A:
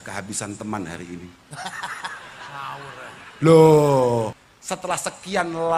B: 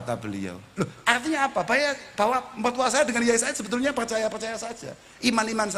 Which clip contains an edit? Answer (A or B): A